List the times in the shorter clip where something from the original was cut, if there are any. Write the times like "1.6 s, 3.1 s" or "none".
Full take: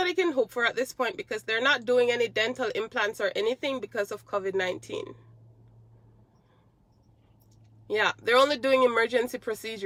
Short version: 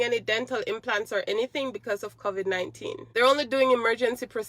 3.1 s